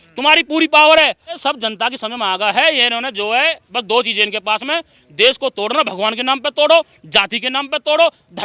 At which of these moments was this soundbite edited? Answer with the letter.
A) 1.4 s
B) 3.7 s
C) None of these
A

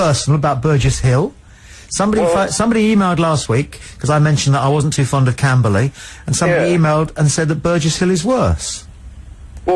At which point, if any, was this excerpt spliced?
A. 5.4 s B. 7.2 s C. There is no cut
B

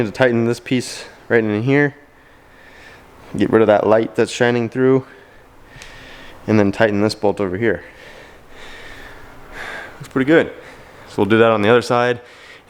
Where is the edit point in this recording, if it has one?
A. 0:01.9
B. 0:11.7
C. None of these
C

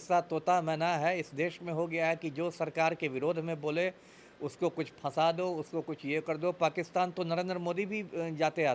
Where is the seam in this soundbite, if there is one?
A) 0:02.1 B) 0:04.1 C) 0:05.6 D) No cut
D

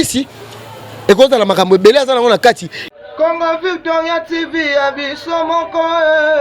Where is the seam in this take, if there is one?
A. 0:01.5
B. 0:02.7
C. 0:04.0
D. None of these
B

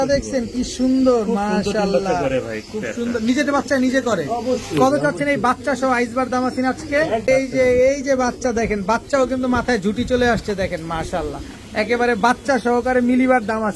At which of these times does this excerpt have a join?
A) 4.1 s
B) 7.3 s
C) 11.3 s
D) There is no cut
B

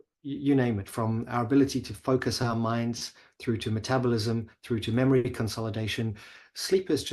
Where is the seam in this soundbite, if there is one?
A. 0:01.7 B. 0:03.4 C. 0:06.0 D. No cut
D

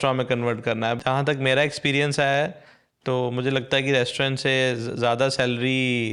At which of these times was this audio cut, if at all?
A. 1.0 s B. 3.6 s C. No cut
A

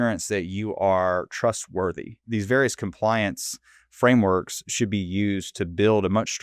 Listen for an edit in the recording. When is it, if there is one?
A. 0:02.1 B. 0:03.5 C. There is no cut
A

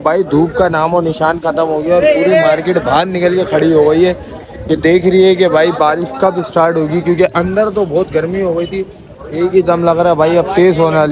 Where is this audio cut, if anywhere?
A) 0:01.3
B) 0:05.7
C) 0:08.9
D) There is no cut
C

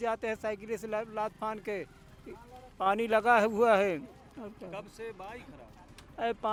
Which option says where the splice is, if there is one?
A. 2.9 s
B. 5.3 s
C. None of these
C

